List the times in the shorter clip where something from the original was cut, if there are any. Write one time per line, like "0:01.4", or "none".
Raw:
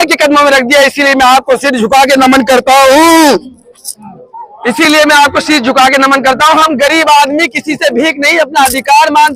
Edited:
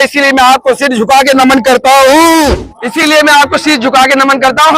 0:02.7

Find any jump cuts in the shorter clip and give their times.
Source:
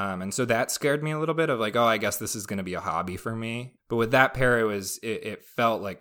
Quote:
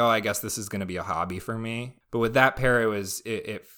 none

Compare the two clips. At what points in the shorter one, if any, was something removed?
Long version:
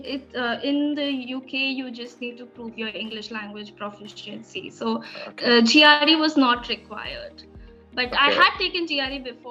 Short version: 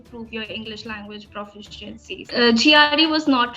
0:02.2

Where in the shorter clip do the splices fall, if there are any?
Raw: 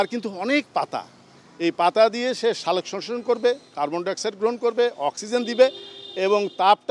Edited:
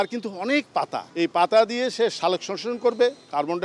0:01.0

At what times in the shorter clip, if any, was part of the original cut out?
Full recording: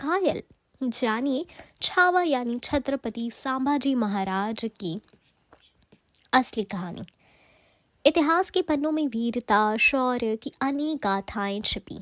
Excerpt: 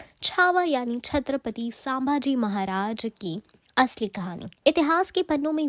0:03.5
0:04.5

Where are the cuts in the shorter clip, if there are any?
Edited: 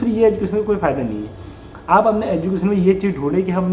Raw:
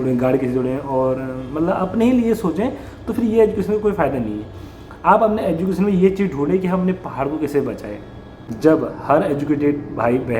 none

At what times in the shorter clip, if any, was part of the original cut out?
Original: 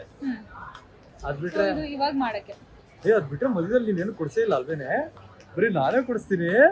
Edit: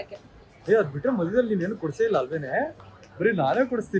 none

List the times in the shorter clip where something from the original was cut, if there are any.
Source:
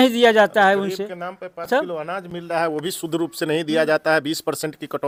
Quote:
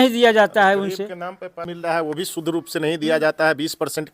0:01.6

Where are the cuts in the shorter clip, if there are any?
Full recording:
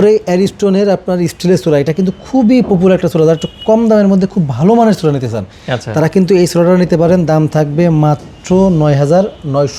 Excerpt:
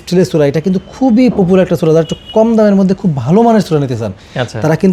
none

